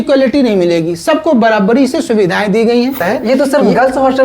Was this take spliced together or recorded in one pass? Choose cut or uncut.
cut